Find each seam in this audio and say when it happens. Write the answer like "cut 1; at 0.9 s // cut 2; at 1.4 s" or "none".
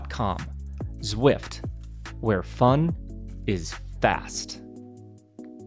cut 1; at 4.2 s